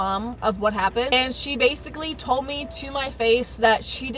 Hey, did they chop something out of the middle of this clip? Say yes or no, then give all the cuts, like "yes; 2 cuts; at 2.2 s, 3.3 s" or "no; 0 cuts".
no; 0 cuts